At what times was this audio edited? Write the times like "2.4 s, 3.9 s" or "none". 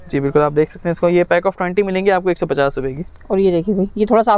none

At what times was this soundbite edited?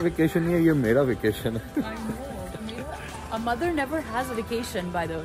none

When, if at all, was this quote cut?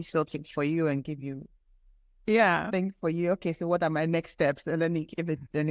2.7 s

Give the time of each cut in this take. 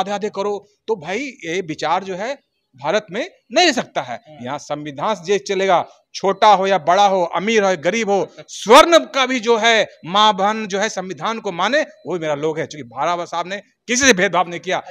none

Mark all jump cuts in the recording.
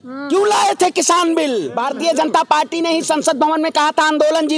1.8 s

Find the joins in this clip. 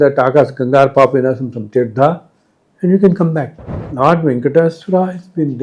3.8 s

